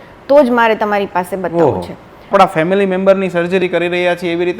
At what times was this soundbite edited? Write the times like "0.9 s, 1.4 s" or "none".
2.3 s